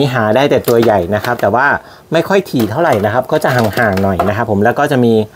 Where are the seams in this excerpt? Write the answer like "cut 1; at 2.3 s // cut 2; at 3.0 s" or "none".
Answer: none